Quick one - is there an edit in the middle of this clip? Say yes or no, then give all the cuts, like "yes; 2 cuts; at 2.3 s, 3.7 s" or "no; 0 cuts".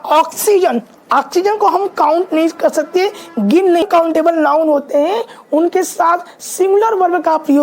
yes; 1 cut; at 3.8 s